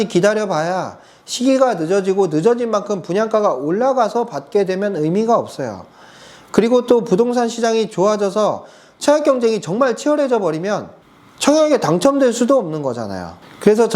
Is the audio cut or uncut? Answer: uncut